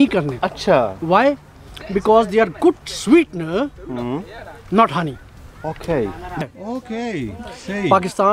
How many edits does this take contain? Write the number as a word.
one